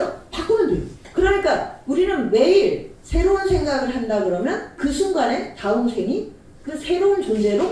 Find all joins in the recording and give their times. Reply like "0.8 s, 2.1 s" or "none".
1.0 s, 4.7 s